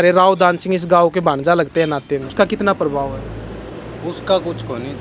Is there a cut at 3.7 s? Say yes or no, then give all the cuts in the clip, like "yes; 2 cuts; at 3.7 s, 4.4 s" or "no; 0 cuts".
no; 1 cut; at 2.3 s